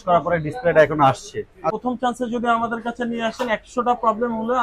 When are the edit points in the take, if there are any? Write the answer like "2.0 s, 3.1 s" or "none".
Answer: 1.8 s